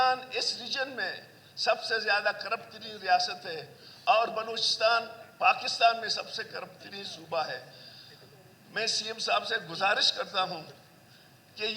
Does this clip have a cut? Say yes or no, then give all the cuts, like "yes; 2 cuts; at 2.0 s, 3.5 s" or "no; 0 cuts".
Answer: no; 0 cuts